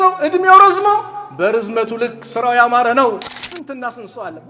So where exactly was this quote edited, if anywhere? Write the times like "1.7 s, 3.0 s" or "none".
3.3 s